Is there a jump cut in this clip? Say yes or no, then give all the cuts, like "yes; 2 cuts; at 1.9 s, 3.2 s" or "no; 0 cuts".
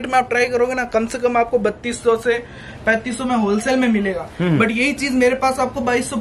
no; 0 cuts